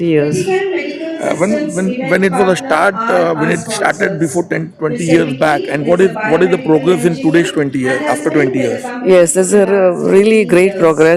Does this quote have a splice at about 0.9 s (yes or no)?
no